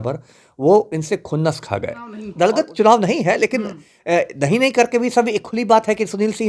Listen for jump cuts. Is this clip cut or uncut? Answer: cut